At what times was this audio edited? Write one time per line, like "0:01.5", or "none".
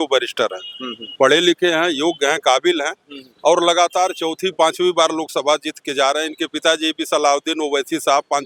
none